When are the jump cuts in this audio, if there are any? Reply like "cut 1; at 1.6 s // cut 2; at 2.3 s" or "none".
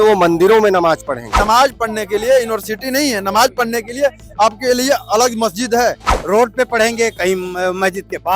cut 1; at 1.4 s // cut 2; at 6.1 s